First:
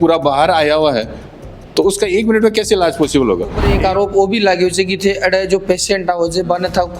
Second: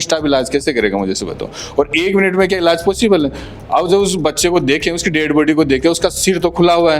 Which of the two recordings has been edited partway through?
first; 1 cut; at 3.6 s

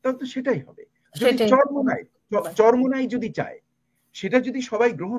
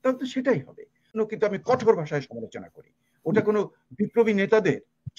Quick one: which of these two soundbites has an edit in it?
second; 1 cut; at 1.2 s

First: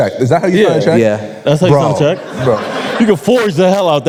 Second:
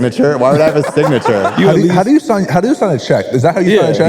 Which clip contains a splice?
second; 1 cut; at 1.5 s

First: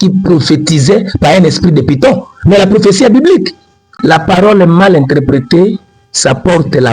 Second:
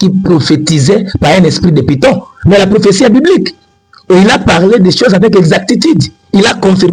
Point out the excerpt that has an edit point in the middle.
first; 1 cut; at 3.9 s

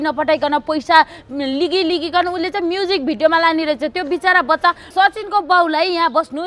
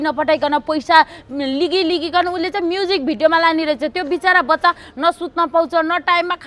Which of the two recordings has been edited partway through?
first; 1 cut; at 4.9 s

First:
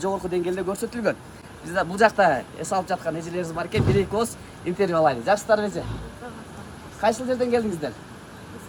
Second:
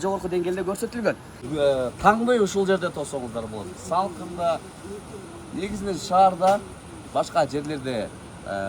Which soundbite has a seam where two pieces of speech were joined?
second; 1 cut; at 1.4 s

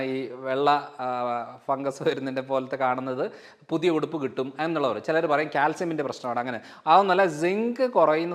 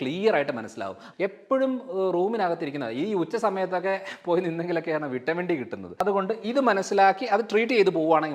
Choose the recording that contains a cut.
second; 2 cuts; at 1.0 s, 6.0 s

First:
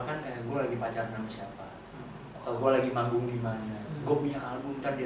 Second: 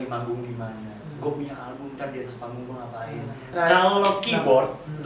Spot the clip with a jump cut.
second; 1 cut; at 3.5 s

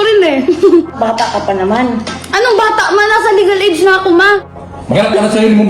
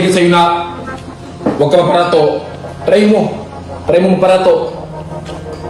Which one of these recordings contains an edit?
first; 2 cuts; at 0.9 s, 4.4 s

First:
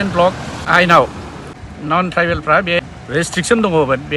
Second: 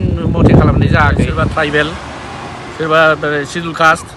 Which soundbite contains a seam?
second; 1 cut; at 1.4 s

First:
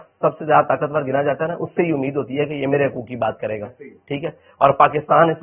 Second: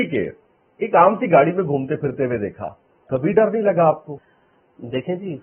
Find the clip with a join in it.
second; 1 cut; at 4.2 s

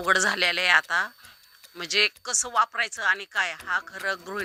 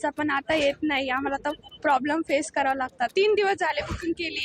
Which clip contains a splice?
second; 1 cut; at 3.1 s

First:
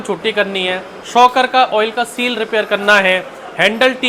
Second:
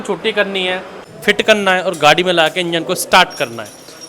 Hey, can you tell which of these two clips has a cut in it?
second; 1 cut; at 1.0 s

